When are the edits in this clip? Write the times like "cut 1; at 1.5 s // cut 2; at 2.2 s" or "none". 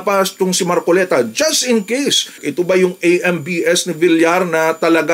cut 1; at 2.4 s